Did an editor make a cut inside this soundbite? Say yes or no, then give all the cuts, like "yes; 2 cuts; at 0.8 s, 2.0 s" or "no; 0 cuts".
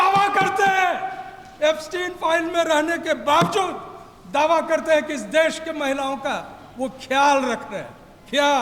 no; 0 cuts